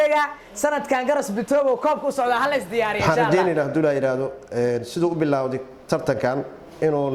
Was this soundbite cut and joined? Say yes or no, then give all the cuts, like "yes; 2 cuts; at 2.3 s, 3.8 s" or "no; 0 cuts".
yes; 1 cut; at 3.0 s